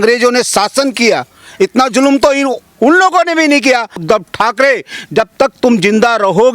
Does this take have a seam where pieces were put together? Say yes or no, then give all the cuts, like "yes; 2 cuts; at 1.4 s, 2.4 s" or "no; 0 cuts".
yes; 1 cut; at 4.0 s